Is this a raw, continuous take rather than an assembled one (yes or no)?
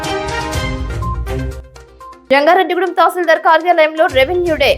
no